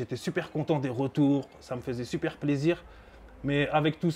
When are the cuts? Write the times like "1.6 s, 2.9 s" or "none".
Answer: none